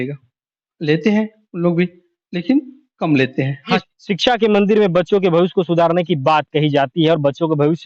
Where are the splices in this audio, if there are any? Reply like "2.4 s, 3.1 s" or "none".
3.8 s